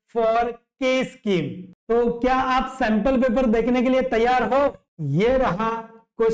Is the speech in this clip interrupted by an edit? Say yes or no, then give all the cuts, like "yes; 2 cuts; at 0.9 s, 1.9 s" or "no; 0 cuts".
yes; 2 cuts; at 1.7 s, 4.8 s